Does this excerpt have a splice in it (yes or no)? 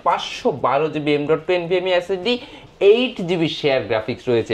no